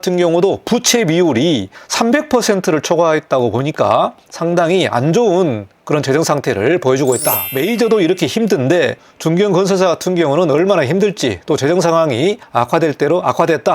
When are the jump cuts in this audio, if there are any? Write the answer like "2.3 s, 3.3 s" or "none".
1.8 s, 4.3 s, 7.5 s, 12.4 s